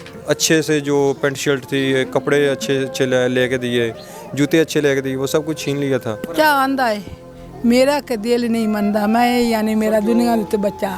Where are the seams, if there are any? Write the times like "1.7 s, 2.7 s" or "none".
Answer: 6.3 s